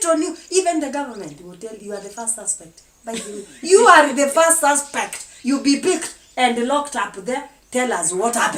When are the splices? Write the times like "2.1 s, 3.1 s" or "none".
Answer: none